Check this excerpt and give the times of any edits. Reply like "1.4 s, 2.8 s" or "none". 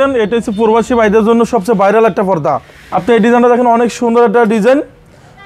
2.7 s